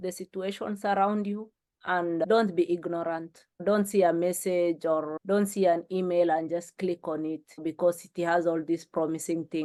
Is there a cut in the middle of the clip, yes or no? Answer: no